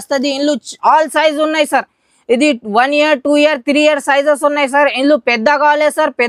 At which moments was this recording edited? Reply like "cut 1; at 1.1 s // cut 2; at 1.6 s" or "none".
none